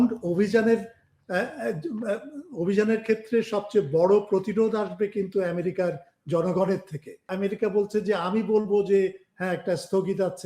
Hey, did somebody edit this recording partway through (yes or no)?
yes